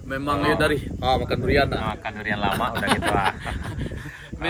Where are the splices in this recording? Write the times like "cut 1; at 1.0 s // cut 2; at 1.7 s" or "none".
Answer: none